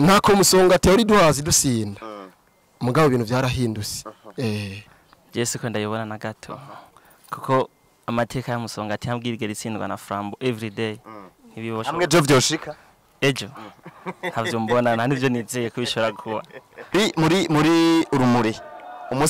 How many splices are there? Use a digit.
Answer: 2